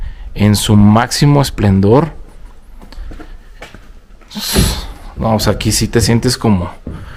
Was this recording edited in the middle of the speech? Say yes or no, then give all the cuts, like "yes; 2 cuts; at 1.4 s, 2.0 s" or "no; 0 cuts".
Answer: no; 0 cuts